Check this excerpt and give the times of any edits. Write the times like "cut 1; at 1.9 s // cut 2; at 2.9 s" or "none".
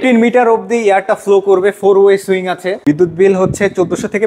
cut 1; at 2.7 s